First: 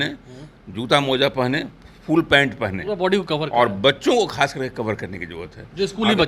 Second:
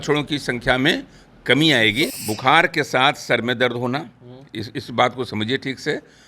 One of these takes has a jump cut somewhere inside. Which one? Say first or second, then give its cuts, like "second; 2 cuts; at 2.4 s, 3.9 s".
second; 1 cut; at 2.1 s